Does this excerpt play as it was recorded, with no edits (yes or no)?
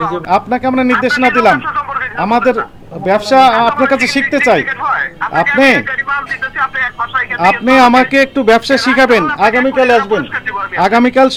yes